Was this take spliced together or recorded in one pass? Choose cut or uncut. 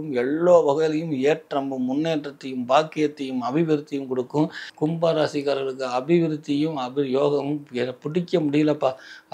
cut